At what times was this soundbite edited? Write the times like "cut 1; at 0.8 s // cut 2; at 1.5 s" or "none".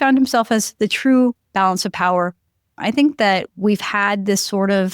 cut 1; at 2.7 s